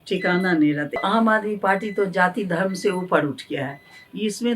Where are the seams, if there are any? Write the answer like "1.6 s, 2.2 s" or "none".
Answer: 1.0 s